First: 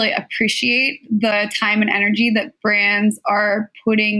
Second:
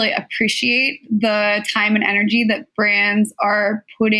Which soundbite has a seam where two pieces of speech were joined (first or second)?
first